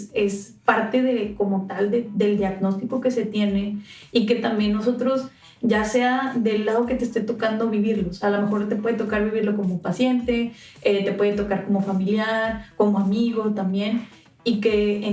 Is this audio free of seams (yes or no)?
yes